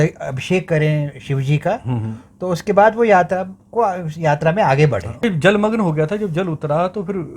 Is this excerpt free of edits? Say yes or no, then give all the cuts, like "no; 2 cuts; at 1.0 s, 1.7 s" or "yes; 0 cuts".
no; 1 cut; at 5.2 s